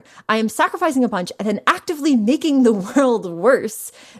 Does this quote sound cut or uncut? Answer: uncut